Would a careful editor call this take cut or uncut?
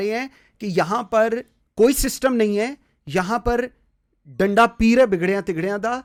uncut